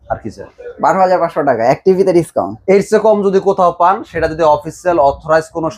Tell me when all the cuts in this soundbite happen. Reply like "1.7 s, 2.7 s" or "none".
none